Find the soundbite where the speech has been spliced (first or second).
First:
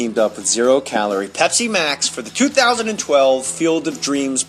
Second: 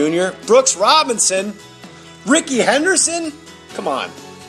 second